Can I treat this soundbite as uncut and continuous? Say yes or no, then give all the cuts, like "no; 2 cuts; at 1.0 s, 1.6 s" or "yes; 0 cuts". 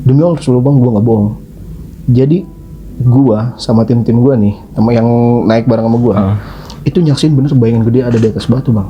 yes; 0 cuts